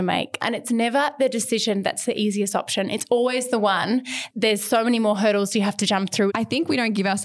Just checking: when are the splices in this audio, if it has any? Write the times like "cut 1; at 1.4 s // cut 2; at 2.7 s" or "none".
cut 1; at 4.2 s // cut 2; at 6.3 s